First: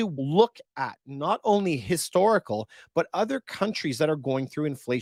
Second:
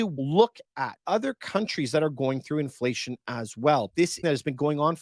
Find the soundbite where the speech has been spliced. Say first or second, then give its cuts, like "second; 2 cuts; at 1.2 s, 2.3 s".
second; 2 cuts; at 1.0 s, 4.1 s